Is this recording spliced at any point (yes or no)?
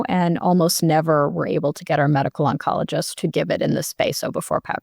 yes